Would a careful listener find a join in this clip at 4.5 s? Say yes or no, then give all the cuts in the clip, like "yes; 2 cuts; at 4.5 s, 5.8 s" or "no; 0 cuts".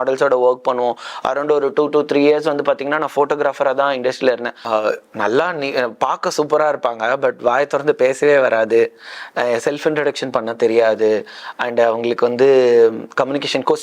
yes; 1 cut; at 4.5 s